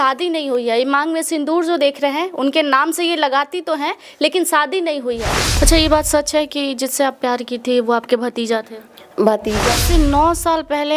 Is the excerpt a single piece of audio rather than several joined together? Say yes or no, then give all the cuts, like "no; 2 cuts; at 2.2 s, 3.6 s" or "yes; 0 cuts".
no; 2 cuts; at 5.4 s, 9.7 s